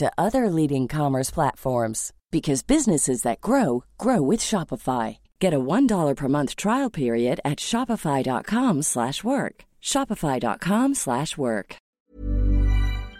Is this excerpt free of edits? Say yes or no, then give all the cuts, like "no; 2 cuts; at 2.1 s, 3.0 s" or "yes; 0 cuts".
no; 1 cut; at 12.0 s